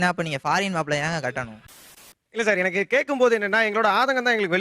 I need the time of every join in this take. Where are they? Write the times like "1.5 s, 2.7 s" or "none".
1.8 s